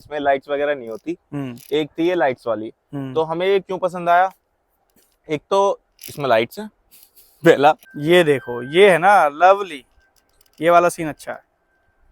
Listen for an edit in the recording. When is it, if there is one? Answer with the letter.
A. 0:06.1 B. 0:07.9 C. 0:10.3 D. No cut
B